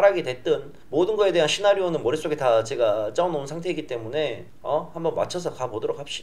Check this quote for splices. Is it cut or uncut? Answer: uncut